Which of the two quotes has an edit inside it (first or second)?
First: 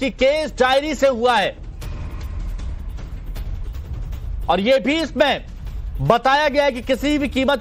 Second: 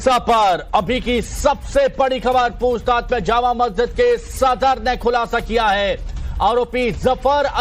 second